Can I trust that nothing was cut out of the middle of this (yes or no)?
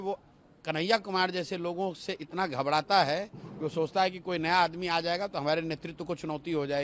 yes